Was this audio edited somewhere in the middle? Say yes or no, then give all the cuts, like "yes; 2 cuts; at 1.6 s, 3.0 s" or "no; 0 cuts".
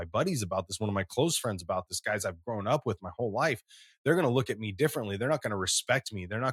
no; 0 cuts